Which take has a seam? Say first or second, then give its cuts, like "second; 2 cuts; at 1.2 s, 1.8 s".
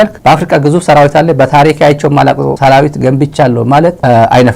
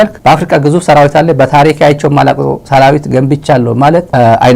first; 1 cut; at 2.5 s